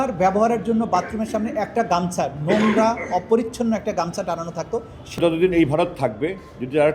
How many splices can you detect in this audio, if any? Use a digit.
1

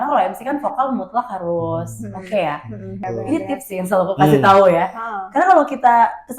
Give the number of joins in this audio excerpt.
1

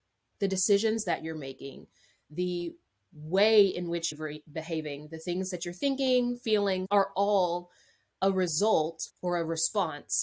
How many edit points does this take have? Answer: 4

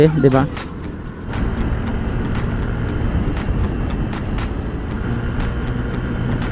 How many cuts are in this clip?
2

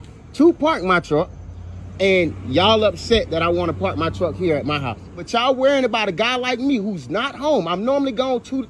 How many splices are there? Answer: 1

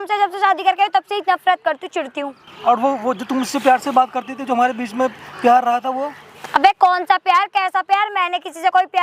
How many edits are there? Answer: 1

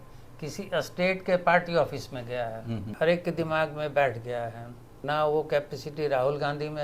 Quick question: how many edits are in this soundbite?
2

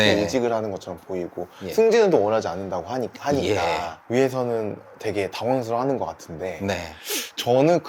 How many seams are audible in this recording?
0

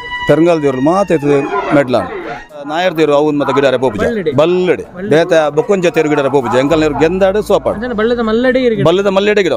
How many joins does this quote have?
1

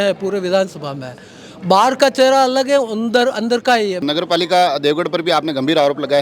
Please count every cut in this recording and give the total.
1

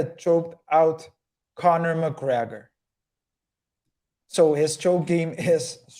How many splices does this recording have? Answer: 0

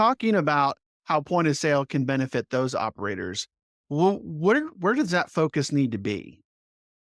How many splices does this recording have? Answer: 0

